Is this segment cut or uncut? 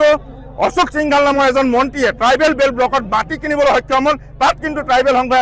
uncut